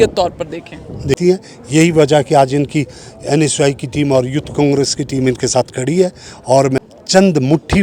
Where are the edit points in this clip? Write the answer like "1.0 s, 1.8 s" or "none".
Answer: 1.2 s, 6.8 s